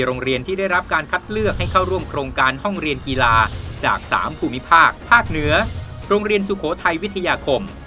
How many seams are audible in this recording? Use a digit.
1